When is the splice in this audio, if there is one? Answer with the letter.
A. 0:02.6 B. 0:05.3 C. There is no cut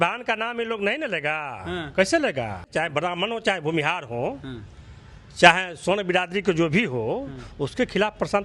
A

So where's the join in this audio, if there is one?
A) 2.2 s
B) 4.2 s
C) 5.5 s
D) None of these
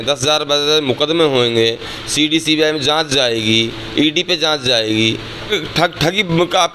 C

